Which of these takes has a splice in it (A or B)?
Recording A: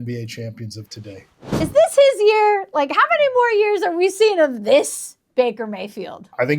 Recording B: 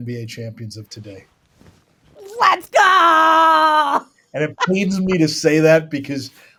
A